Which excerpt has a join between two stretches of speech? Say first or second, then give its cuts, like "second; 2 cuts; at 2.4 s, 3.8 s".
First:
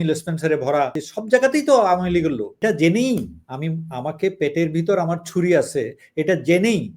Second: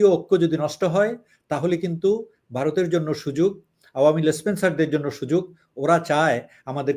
first; 2 cuts; at 1.1 s, 2.6 s